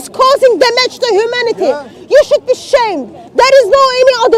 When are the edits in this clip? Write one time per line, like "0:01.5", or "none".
none